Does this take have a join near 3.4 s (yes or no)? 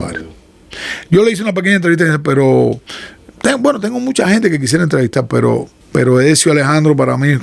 no